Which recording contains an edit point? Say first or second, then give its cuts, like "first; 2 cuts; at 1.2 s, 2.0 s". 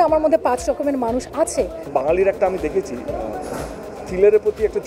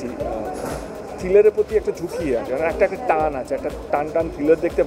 first; 1 cut; at 1.9 s